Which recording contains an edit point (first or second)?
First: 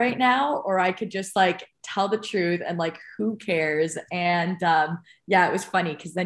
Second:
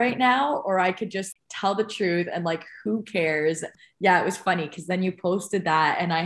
second